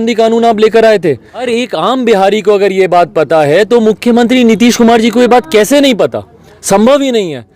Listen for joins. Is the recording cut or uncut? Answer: cut